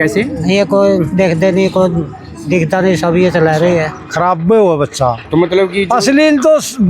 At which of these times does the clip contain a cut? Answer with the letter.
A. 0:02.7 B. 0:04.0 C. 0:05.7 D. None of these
B